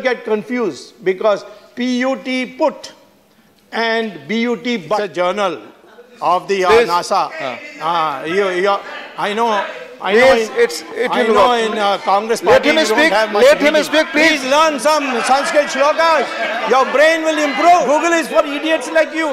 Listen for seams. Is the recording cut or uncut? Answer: cut